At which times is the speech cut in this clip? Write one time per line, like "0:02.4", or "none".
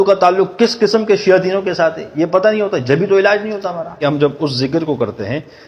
0:04.0